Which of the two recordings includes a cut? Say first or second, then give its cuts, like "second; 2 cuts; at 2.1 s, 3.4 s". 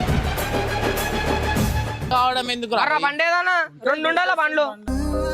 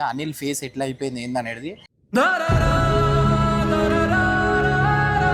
first; 1 cut; at 2.1 s